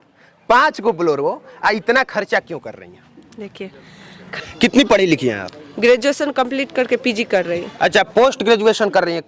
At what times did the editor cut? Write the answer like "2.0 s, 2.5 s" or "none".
4.2 s

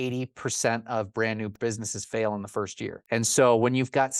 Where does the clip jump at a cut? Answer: 1.5 s, 3.0 s

